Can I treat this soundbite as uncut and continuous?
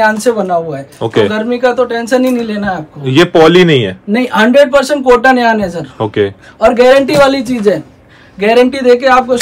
yes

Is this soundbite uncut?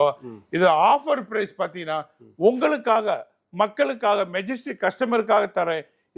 yes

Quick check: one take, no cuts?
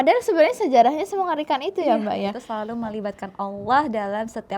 no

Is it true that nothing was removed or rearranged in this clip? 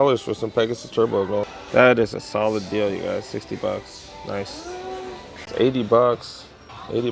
no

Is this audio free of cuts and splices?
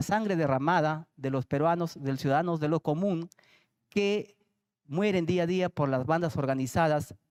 yes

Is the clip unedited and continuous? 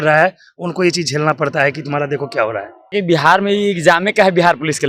no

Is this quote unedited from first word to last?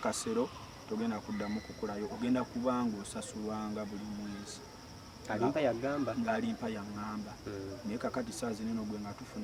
yes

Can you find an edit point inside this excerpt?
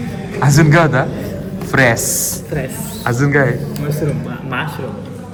no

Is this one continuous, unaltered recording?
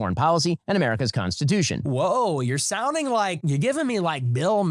no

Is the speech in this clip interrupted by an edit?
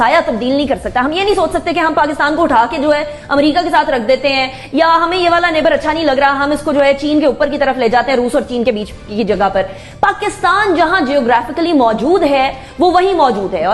no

